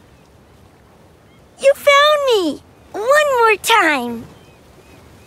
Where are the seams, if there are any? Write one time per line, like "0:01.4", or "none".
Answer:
0:01.6
0:04.2